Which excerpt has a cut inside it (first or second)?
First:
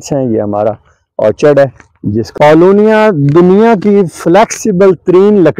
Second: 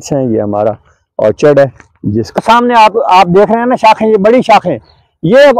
second